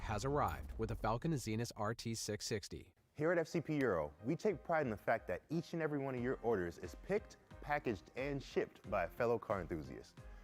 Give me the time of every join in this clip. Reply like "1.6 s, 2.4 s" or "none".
2.8 s